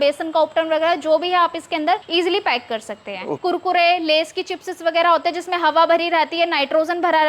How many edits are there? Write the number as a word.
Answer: two